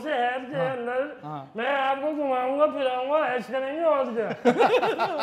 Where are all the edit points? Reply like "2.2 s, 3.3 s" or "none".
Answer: none